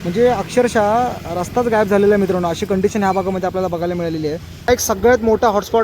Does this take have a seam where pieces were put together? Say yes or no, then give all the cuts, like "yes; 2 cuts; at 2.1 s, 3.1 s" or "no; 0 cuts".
yes; 1 cut; at 4.7 s